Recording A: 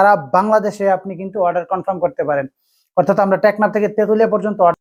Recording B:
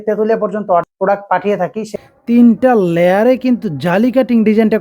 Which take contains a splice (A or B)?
B